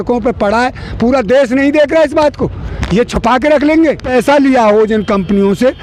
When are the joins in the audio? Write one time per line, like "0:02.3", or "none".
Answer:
0:04.0